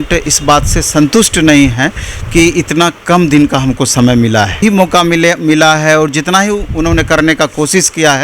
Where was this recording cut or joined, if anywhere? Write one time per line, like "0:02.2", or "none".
0:04.6